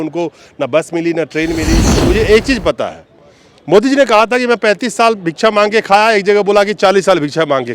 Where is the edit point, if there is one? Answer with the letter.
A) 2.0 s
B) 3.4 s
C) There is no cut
A